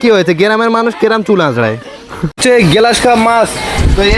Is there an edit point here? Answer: yes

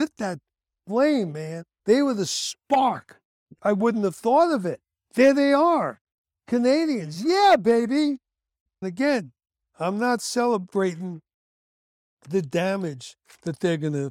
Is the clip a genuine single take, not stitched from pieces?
no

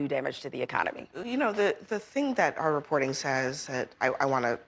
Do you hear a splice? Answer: no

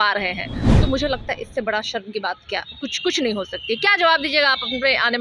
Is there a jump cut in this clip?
no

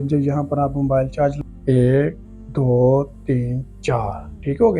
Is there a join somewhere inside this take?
yes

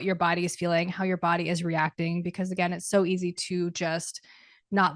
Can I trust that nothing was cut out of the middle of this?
yes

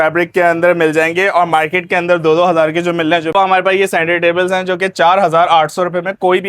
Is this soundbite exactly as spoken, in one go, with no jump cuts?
no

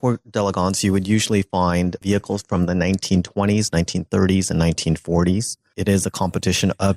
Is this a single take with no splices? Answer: no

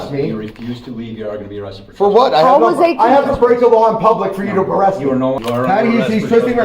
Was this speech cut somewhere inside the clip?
yes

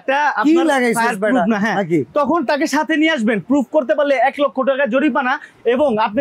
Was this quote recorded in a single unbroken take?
yes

